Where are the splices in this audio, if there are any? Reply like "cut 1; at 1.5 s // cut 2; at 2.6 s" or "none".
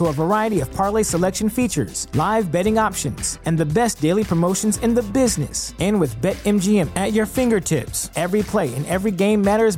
none